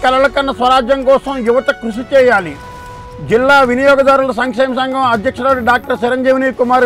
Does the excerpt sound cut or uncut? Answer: uncut